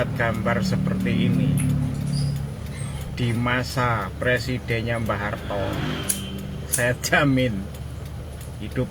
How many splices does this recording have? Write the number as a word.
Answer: zero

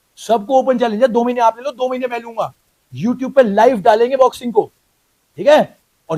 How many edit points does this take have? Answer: zero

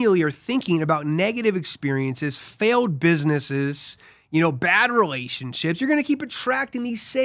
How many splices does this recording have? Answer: zero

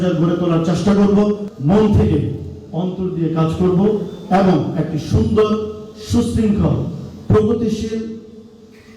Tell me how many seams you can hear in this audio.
one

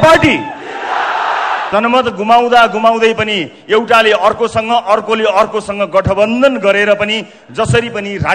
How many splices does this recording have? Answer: one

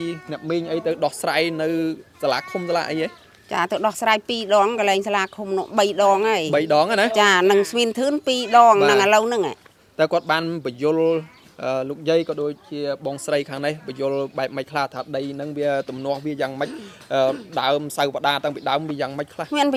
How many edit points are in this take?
zero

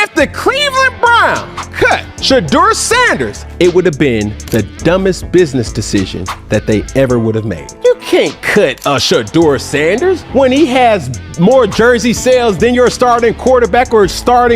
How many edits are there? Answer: zero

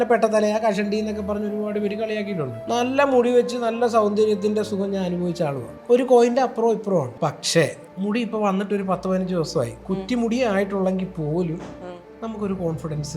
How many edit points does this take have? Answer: four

